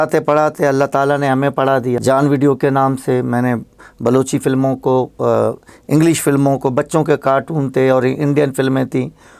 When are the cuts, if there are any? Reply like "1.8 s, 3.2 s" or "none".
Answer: 2.0 s